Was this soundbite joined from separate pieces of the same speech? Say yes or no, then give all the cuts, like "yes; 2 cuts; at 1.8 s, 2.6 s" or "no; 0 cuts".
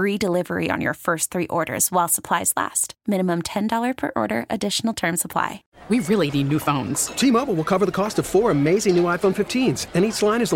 yes; 1 cut; at 5.6 s